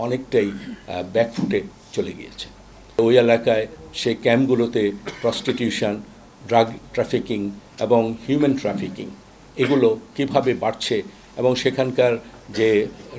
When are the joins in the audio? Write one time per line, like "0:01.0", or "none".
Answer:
0:03.0

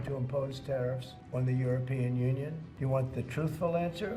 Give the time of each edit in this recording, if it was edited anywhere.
0:01.1
0:02.7

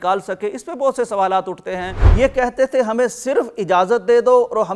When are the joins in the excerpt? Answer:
0:02.0

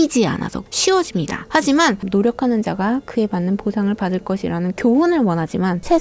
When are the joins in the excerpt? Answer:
0:02.0

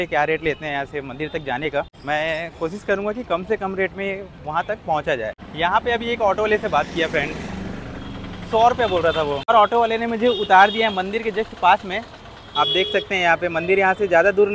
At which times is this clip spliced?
0:02.0
0:05.4
0:09.5

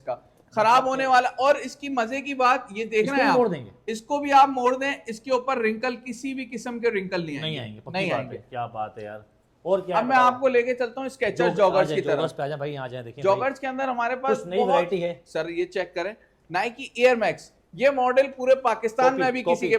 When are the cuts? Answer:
none

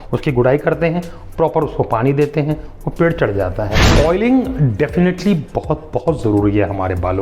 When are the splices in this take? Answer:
0:03.8

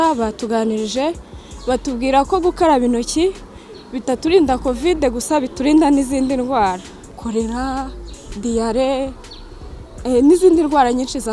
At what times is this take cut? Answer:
none

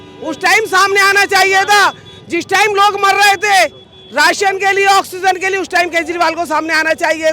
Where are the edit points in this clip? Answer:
none

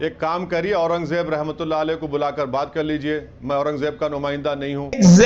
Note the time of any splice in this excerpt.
none

